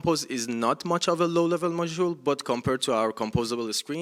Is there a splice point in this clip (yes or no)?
no